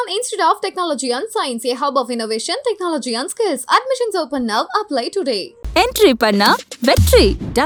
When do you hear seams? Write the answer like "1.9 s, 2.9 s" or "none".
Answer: none